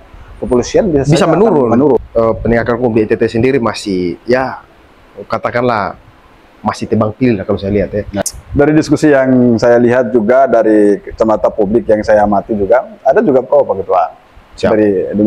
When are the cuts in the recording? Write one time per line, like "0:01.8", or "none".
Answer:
0:02.0
0:08.2